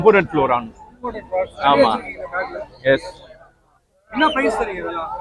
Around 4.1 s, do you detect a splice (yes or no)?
no